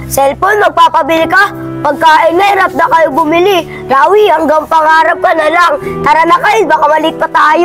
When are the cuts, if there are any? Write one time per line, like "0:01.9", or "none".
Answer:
none